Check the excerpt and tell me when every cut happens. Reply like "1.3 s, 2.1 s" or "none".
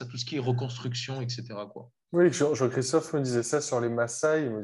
none